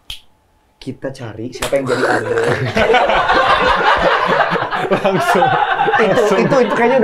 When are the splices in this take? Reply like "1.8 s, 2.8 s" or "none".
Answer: none